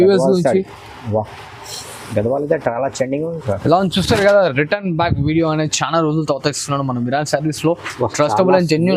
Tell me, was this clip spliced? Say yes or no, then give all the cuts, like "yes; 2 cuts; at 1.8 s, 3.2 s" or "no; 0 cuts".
no; 0 cuts